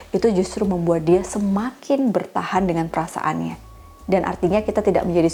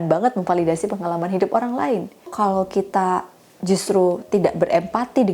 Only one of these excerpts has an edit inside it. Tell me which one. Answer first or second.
second